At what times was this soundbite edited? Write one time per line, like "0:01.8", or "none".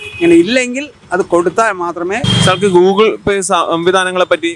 0:02.2